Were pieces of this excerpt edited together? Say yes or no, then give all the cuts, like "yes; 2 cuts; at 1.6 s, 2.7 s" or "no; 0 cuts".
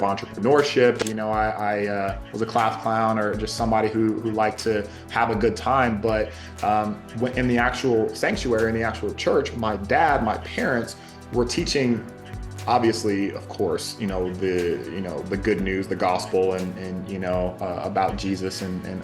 yes; 1 cut; at 1.0 s